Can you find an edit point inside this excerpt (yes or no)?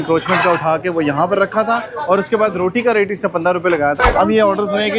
yes